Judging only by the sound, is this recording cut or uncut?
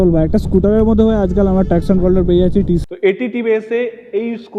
cut